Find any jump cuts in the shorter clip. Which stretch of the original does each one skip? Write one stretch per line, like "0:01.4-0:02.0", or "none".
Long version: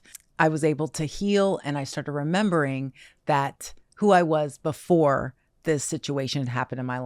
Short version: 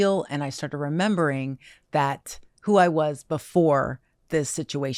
none

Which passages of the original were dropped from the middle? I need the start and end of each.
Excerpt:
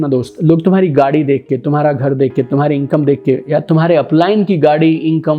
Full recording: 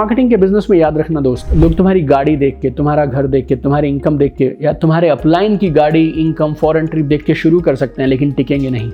none

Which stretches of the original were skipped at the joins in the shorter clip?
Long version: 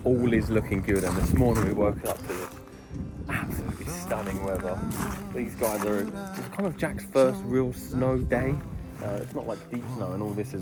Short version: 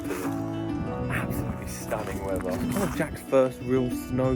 0:04.9-0:06.5

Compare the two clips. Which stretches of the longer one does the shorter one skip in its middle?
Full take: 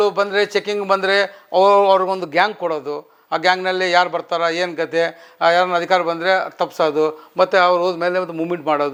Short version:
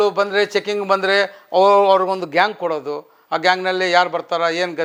none

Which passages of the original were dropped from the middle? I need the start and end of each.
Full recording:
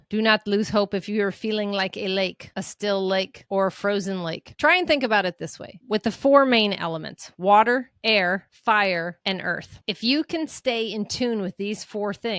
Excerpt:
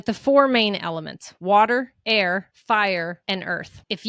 none

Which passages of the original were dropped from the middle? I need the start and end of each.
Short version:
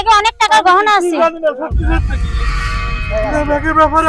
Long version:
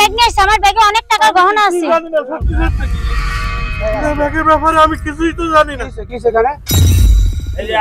none

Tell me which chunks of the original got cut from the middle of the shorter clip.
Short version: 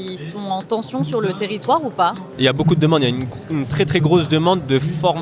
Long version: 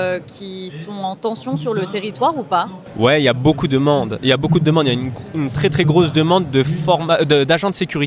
0:02.8-0:04.1

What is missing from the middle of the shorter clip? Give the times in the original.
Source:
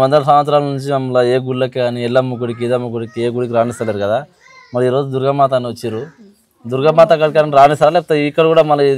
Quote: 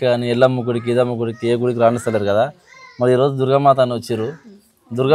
none

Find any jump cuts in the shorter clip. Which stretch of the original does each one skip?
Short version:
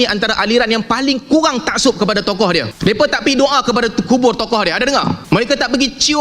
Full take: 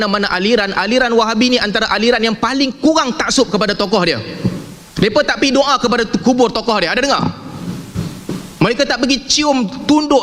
0:04.2-0:04.9
0:07.4-0:08.5

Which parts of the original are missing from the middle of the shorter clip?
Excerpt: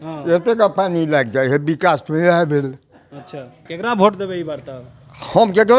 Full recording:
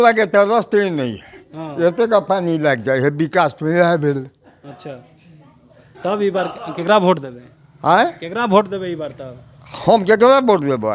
0:05.2-0:08.2

